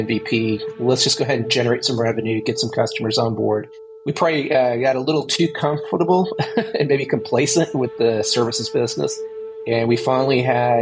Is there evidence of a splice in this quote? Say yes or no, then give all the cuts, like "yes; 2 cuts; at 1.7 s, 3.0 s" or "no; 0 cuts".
yes; 2 cuts; at 4.0 s, 9.5 s